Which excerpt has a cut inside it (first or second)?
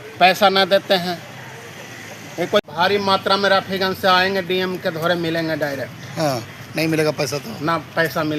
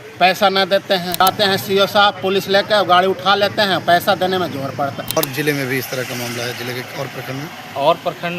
second